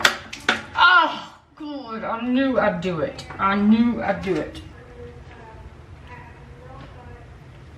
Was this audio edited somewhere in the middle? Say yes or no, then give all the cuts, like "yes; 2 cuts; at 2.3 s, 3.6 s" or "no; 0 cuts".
yes; 1 cut; at 4.7 s